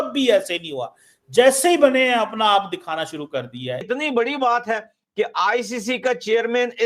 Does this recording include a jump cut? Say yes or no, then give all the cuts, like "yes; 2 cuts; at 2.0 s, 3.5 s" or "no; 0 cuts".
yes; 1 cut; at 3.8 s